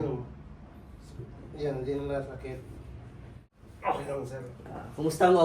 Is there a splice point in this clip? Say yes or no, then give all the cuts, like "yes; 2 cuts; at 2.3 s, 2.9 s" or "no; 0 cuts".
yes; 1 cut; at 3.5 s